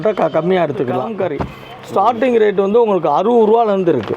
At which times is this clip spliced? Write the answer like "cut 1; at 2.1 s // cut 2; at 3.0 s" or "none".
cut 1; at 1.1 s